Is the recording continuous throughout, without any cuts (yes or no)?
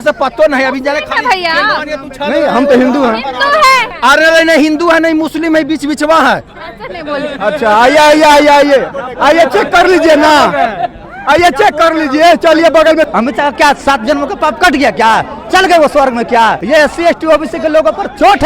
no